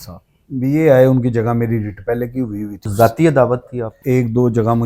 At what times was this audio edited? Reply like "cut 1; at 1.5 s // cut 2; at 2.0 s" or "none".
cut 1; at 2.8 s // cut 2; at 4.0 s